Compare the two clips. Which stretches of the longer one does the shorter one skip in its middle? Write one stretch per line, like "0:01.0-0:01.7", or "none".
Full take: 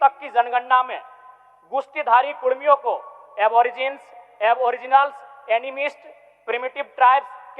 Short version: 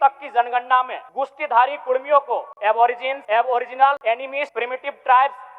0:01.0-0:01.6
0:03.3-0:03.8
0:05.3-0:06.1